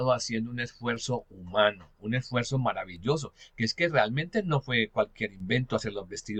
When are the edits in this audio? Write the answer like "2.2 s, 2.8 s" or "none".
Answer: none